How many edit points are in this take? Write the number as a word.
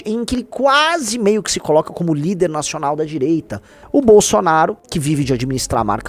one